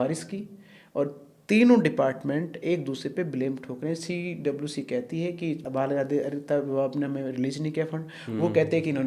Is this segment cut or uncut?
cut